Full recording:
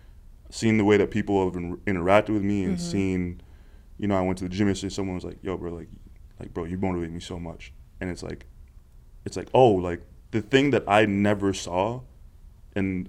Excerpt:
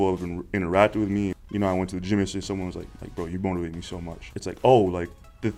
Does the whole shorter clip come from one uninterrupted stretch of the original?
no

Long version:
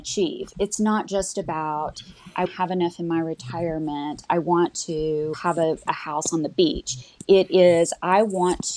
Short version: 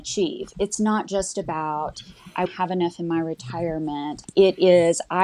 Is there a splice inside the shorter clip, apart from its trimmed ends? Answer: yes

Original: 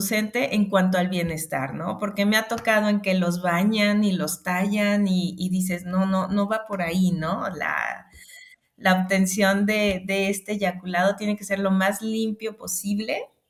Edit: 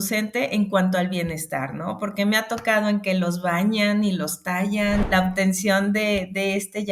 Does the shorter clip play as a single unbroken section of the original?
no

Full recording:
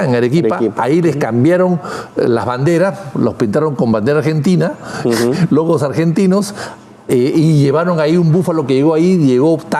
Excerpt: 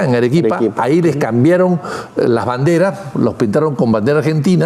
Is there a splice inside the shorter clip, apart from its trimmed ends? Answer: no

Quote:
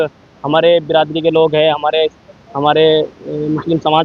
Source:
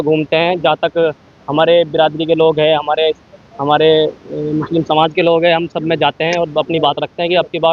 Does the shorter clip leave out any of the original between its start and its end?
no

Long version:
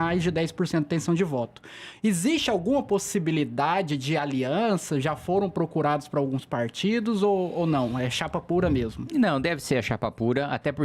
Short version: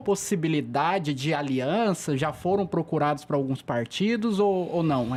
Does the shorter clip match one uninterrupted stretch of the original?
yes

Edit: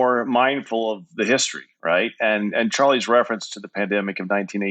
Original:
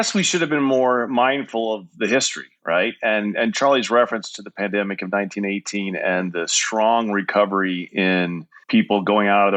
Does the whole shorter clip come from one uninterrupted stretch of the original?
yes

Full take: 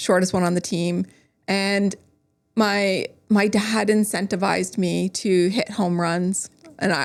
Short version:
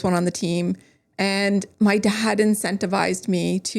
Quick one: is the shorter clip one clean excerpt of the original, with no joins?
no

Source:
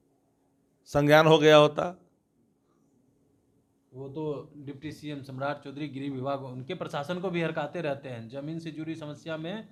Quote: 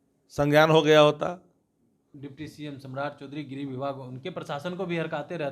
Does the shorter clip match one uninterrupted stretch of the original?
no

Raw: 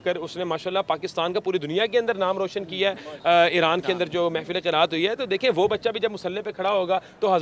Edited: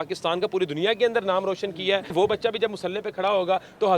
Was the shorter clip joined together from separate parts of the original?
yes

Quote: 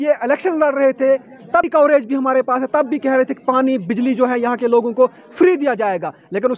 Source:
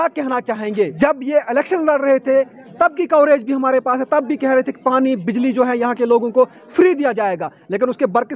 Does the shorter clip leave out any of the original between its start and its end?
yes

